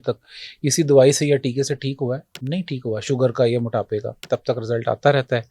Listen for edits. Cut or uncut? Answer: cut